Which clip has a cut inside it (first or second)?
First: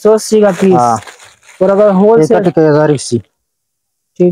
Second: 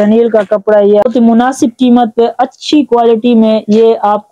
second